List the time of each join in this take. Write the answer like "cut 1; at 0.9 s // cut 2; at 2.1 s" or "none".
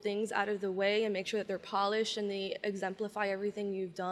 none